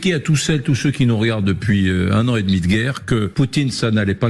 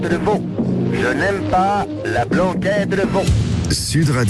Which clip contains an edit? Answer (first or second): first